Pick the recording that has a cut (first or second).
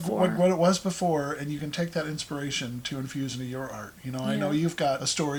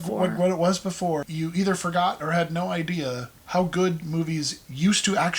second